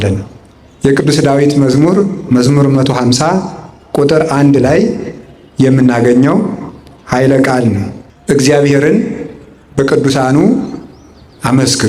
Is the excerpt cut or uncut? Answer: uncut